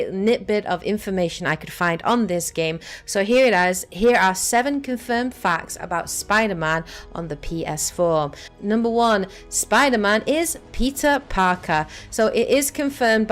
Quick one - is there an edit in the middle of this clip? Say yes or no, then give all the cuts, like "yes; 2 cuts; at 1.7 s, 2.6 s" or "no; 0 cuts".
yes; 1 cut; at 6.8 s